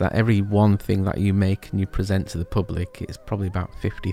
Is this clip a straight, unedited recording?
yes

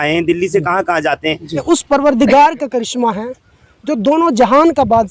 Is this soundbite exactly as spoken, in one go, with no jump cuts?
yes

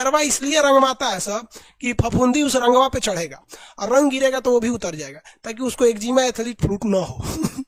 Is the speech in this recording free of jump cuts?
yes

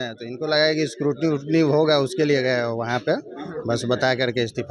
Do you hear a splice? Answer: no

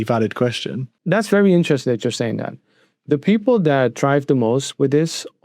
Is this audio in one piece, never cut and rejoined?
no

